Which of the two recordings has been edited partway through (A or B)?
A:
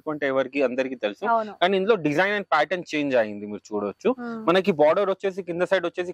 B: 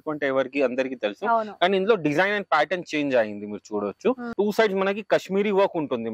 B